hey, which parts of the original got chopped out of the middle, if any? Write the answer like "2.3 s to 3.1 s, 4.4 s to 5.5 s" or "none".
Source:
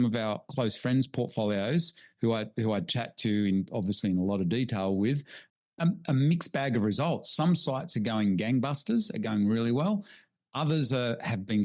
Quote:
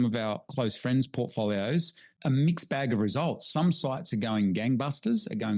2.2 s to 6.0 s